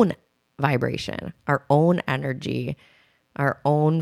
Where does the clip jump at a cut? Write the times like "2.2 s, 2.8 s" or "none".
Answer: none